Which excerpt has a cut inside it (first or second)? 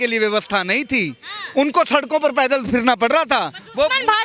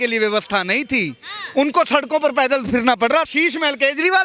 second